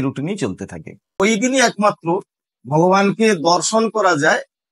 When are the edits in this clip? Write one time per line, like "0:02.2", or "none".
0:01.1